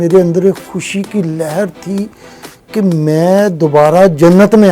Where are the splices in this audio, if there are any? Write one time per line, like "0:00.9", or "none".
none